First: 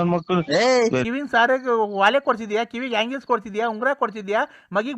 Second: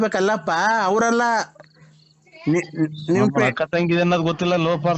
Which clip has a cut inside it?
first; 1 cut; at 1.0 s

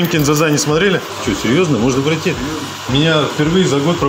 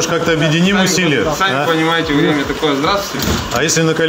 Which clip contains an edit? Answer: first; 2 cuts; at 1.1 s, 2.9 s

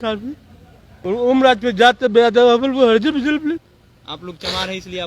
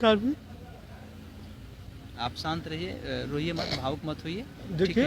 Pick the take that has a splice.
first; 1 cut; at 0.9 s

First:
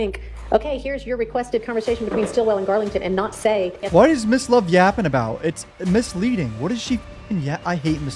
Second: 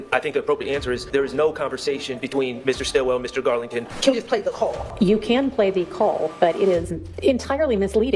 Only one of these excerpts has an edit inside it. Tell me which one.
second; 4 cuts; at 1.0 s, 3.9 s, 4.9 s, 7.0 s

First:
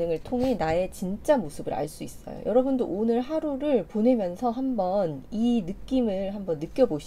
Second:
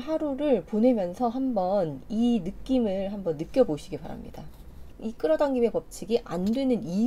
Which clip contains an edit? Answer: second; 1 cut; at 4.9 s

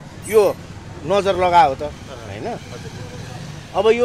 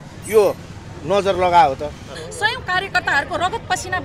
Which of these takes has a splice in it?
second; 1 cut; at 2.2 s

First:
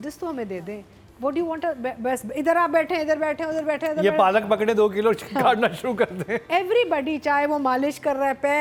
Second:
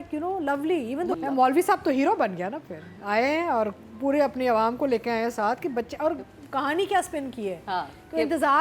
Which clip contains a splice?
second; 1 cut; at 1.2 s

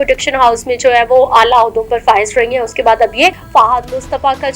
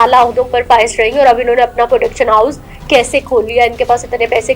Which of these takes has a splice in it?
first; 1 cut; at 3.4 s

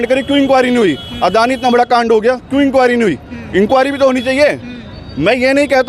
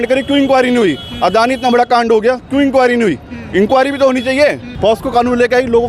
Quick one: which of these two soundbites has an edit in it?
second; 1 cut; at 4.7 s

